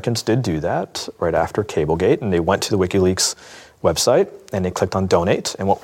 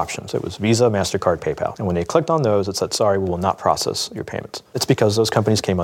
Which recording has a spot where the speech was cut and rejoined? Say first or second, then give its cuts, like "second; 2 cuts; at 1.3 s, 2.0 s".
second; 2 cuts; at 1.8 s, 4.8 s